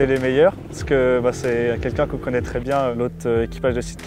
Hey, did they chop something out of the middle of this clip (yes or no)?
no